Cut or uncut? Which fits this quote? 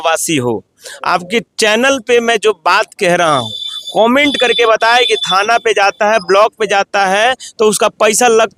uncut